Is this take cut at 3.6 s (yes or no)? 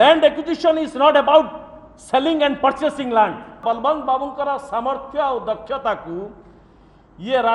yes